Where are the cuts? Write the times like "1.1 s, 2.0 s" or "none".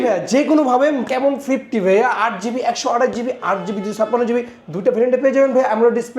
none